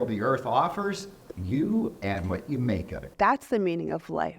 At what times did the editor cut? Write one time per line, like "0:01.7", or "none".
0:03.1